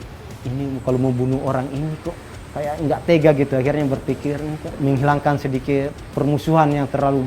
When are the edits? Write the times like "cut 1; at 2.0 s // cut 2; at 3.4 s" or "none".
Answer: cut 1; at 4.7 s // cut 2; at 6.0 s

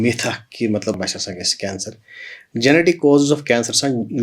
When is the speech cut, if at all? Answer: cut 1; at 1.0 s

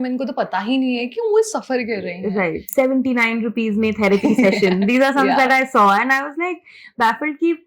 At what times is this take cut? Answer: cut 1; at 2.7 s

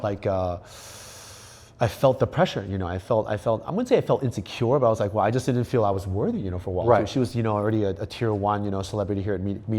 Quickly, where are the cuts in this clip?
none

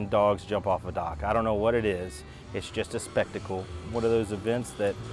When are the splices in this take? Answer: cut 1; at 3.8 s

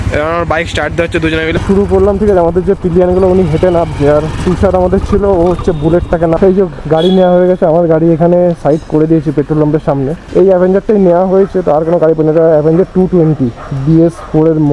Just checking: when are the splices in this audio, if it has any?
cut 1; at 1.6 s // cut 2; at 6.4 s // cut 3; at 10.2 s

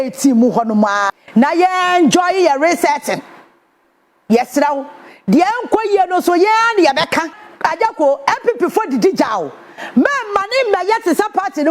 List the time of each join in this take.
cut 1; at 1.2 s // cut 2; at 7.4 s

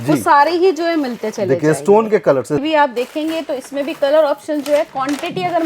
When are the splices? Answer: cut 1; at 2.6 s

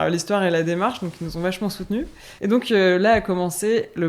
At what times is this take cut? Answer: cut 1; at 2.2 s

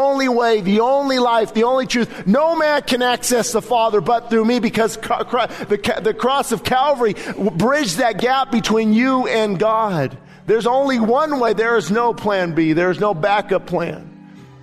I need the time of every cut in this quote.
none

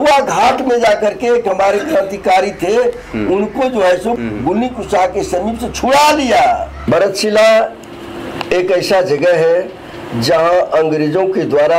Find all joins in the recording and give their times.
cut 1; at 6.7 s

